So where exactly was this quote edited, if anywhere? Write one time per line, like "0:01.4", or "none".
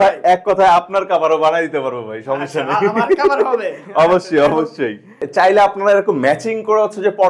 0:05.2